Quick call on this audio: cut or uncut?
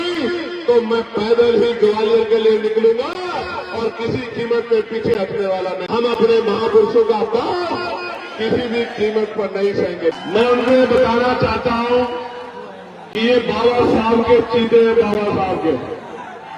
cut